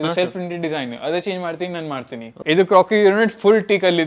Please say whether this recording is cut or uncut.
cut